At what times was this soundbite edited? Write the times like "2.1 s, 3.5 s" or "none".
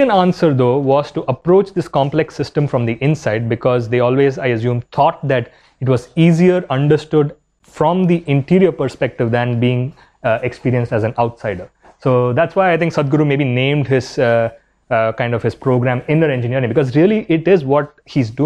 none